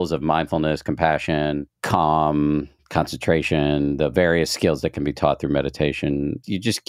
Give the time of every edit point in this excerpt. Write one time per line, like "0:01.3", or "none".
0:01.7